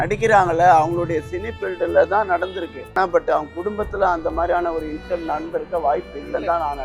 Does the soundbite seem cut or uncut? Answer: cut